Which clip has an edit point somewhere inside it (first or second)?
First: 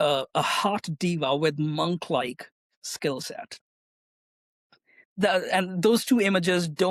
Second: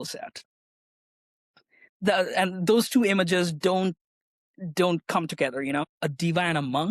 second